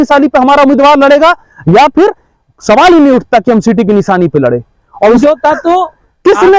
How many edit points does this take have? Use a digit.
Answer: 1